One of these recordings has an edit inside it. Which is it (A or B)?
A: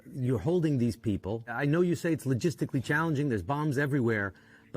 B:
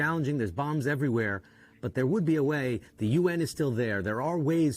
A